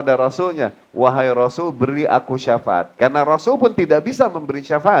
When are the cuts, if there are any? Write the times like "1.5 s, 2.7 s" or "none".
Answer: none